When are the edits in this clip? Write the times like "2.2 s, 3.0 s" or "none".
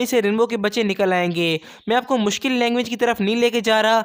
none